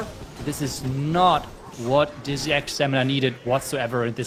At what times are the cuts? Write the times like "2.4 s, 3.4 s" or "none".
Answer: none